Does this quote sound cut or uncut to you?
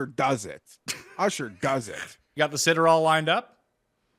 cut